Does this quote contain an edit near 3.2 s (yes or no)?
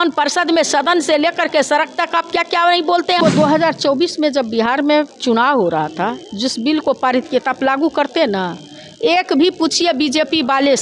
yes